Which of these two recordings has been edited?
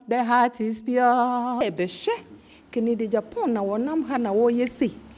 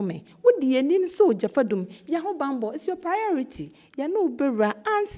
first; 1 cut; at 1.6 s

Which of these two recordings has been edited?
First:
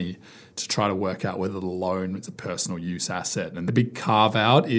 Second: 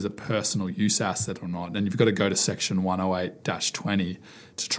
first; 1 cut; at 3.7 s

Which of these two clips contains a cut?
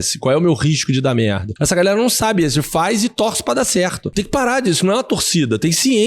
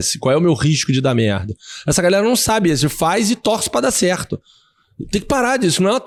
first; 2 cuts; at 1.5 s, 4.0 s

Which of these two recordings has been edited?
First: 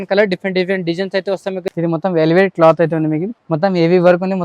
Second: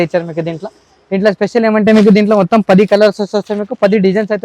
first; 2 cuts; at 1.7 s, 3.3 s

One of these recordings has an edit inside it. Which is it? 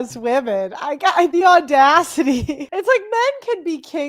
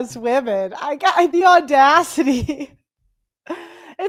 first; 1 cut; at 2.7 s

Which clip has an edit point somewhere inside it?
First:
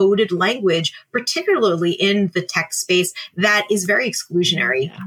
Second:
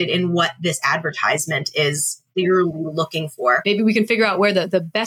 second; 2 cuts; at 2.3 s, 3.6 s

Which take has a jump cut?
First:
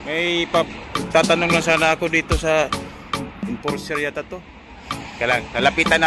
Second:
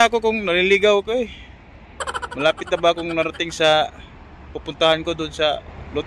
first; 1 cut; at 5.1 s

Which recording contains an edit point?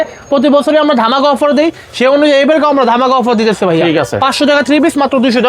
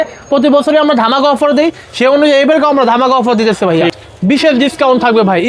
second; 1 cut; at 3.9 s

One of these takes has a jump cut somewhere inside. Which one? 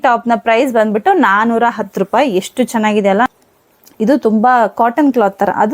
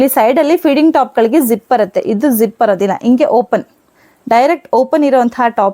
first; 1 cut; at 3.3 s

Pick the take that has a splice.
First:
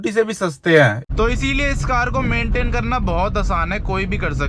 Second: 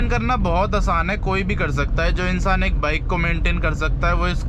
first; 1 cut; at 1.0 s

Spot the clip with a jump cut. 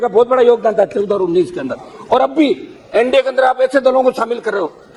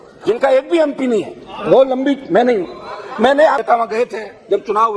second; 1 cut; at 3.6 s

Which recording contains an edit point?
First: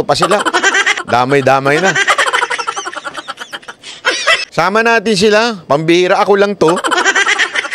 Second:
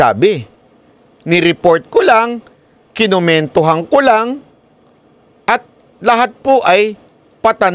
first; 1 cut; at 4.4 s

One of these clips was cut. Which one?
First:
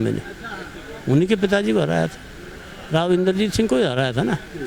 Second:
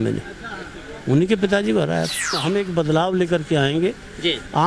second; 1 cut; at 2.4 s

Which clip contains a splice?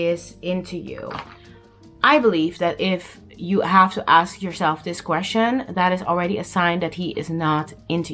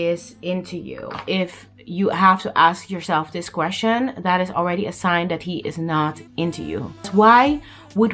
second; 2 cuts; at 1.2 s, 7.1 s

